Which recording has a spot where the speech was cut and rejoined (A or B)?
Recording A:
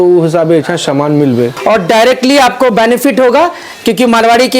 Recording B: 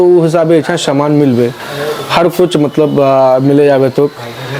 A